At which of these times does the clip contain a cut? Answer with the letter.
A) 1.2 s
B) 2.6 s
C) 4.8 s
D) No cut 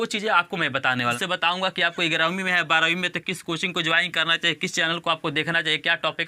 A